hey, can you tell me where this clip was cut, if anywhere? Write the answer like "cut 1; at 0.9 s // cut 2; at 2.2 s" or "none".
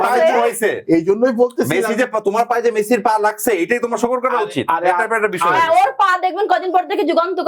none